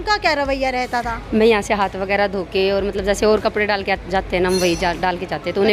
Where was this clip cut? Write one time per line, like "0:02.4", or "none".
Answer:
none